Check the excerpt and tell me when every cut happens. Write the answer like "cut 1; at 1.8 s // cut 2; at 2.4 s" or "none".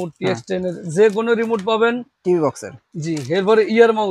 none